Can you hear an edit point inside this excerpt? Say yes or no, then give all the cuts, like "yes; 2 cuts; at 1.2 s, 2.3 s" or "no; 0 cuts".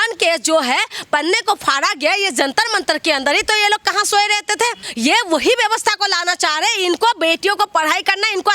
yes; 1 cut; at 4.8 s